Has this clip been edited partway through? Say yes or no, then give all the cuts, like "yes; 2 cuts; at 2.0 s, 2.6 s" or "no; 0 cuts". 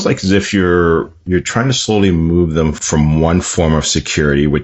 yes; 1 cut; at 2.8 s